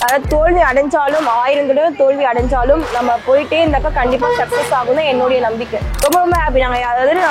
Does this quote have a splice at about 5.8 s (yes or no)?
yes